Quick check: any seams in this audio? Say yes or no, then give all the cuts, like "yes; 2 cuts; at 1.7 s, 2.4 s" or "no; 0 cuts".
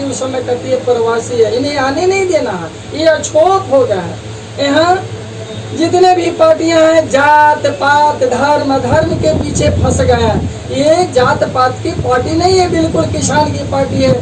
yes; 1 cut; at 7.4 s